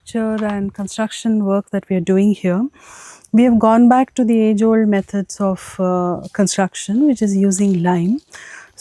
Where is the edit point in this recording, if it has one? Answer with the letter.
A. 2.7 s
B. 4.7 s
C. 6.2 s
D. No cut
D